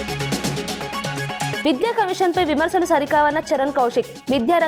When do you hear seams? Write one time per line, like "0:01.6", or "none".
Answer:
0:01.6